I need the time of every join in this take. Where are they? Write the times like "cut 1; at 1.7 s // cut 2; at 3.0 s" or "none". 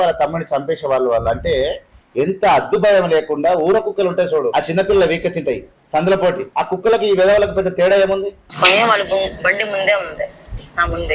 cut 1; at 4.5 s // cut 2; at 5.7 s // cut 3; at 6.5 s // cut 4; at 8.4 s

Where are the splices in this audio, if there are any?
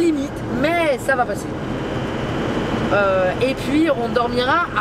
none

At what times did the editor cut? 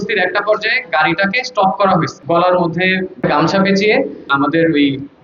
cut 1; at 2.1 s // cut 2; at 3.1 s // cut 3; at 4.3 s

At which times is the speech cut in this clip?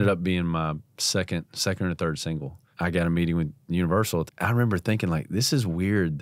cut 1; at 2.6 s // cut 2; at 4.3 s

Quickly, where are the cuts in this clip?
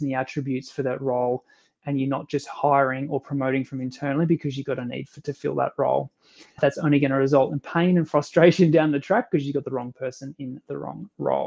none

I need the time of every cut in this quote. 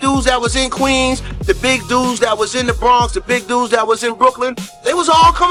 none

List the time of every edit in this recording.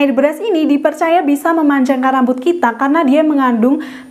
none

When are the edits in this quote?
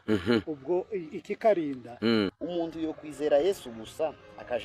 cut 1; at 2.3 s

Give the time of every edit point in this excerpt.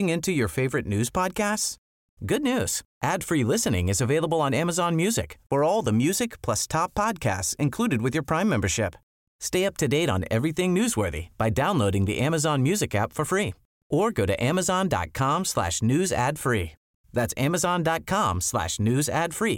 none

